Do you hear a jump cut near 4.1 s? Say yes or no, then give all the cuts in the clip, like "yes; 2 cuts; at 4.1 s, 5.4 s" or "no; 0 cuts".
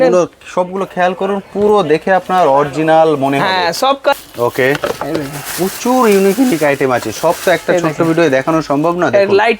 yes; 1 cut; at 4.1 s